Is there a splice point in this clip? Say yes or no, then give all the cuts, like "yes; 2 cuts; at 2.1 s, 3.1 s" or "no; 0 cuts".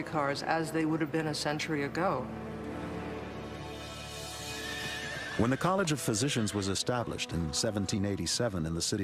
yes; 1 cut; at 6.8 s